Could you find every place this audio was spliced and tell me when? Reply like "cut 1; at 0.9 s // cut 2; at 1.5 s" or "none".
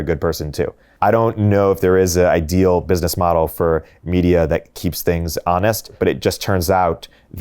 cut 1; at 0.9 s // cut 2; at 4.8 s // cut 3; at 5.9 s